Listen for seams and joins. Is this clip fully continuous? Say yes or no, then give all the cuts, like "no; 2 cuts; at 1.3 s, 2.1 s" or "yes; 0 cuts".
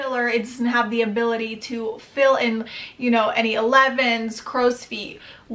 yes; 0 cuts